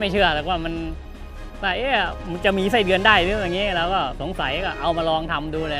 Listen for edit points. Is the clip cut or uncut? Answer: cut